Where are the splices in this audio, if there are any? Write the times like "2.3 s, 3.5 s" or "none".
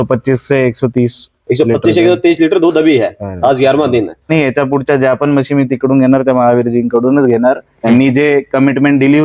4.3 s, 7.7 s